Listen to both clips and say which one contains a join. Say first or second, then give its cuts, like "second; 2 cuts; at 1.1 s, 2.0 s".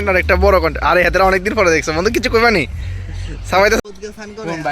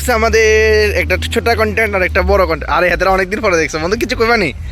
first; 1 cut; at 3.8 s